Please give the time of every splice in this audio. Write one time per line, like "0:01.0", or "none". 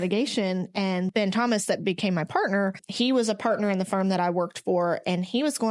0:01.1
0:02.8

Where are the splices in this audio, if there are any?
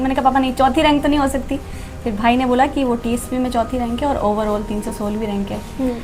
none

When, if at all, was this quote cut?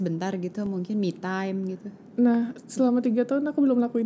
none

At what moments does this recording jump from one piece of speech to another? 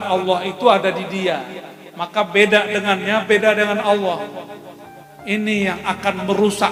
none

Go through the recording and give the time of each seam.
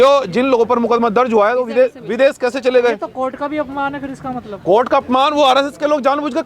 none

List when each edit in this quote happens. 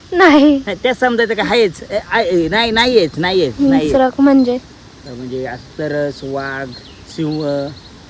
0:03.5

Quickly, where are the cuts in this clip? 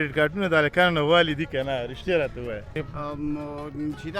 0:02.8

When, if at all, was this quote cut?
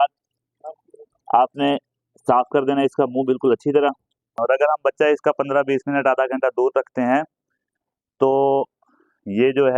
0:04.3

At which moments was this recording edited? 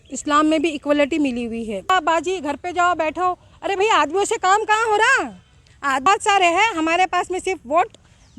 0:01.9
0:06.1

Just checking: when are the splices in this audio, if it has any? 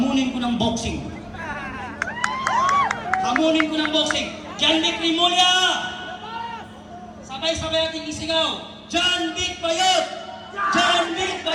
none

